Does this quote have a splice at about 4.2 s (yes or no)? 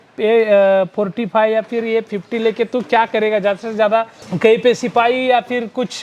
yes